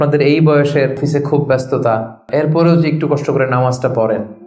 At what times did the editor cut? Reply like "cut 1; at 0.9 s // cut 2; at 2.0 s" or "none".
cut 1; at 1.0 s // cut 2; at 2.3 s